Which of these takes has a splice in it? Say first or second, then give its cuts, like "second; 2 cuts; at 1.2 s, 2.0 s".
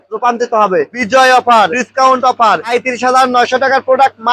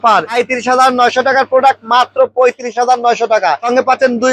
first; 1 cut; at 0.9 s